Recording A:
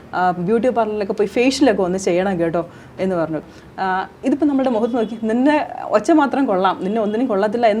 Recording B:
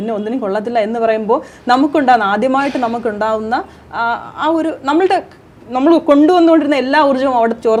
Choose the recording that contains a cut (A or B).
A